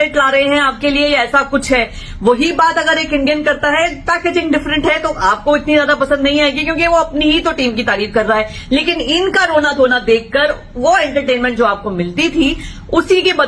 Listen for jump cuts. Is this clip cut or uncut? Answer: uncut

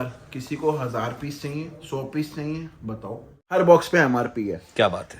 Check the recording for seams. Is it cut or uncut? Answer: cut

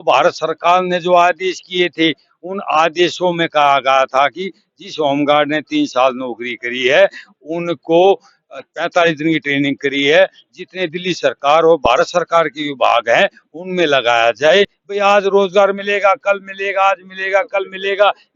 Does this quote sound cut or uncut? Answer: cut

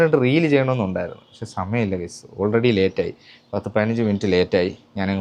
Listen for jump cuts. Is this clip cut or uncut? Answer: uncut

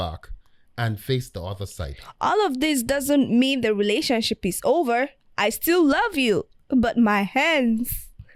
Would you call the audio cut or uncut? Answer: uncut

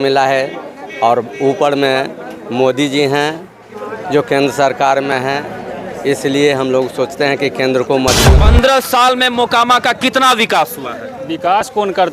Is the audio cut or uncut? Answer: cut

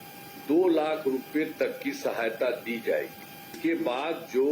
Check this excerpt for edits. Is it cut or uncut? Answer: cut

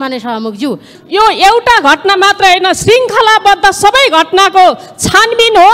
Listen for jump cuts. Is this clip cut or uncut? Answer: cut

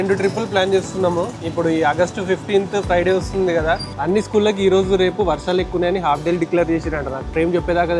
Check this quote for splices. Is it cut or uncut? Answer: cut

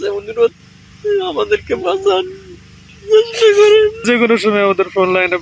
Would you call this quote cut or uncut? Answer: cut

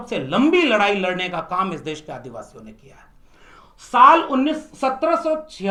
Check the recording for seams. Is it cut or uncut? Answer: uncut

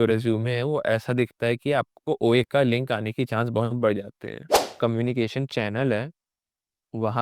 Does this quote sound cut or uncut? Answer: cut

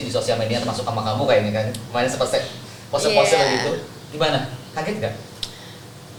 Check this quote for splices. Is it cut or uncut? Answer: uncut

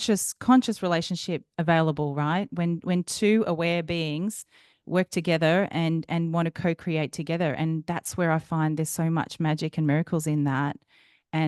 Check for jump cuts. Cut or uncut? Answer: uncut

